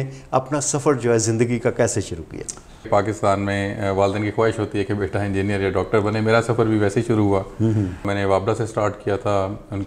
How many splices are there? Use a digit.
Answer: 2